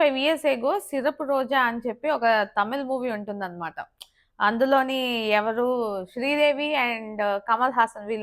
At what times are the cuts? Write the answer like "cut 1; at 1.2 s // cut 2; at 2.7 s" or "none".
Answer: none